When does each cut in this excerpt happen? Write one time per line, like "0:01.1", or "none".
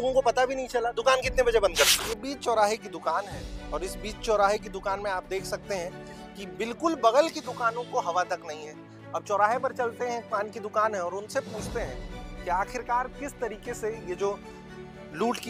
0:02.1